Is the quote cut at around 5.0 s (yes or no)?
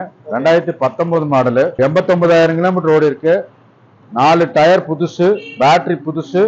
no